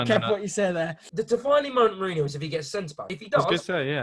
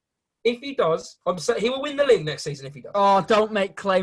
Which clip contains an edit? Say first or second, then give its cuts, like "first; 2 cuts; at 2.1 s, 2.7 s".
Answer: first; 2 cuts; at 1.0 s, 3.0 s